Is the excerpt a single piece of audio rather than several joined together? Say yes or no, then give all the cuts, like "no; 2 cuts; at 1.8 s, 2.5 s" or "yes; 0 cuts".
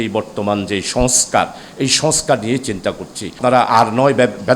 no; 1 cut; at 3.4 s